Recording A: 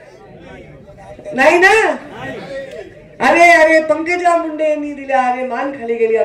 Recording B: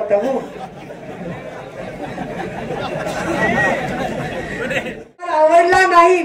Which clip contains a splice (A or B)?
B